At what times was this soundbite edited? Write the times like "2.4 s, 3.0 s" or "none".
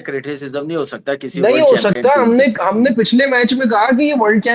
none